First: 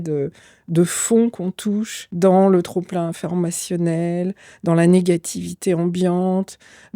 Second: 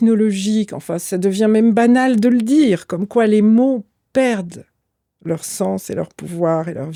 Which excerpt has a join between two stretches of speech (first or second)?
first